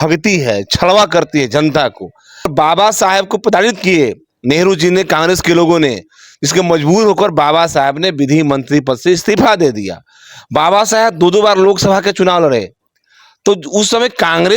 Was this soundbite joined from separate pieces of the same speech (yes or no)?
yes